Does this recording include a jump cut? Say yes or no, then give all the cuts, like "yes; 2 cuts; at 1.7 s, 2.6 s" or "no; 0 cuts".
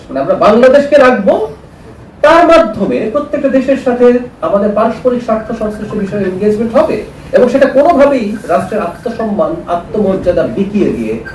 no; 0 cuts